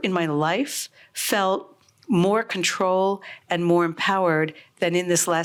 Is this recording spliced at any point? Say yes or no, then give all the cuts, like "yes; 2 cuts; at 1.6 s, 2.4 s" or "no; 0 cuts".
no; 0 cuts